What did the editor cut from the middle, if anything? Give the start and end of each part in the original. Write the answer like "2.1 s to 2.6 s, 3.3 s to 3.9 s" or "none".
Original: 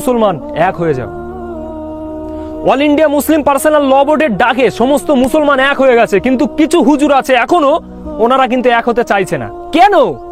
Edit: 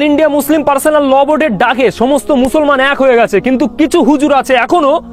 none